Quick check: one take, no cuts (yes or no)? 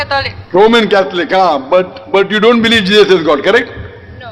yes